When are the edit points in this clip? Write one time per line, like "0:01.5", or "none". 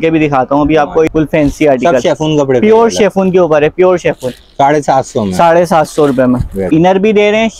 0:01.1
0:06.6